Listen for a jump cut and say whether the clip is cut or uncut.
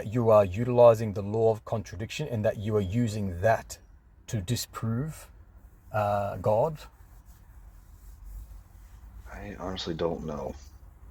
uncut